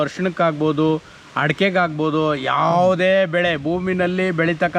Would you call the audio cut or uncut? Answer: uncut